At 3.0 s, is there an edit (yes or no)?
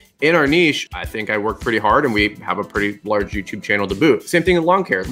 no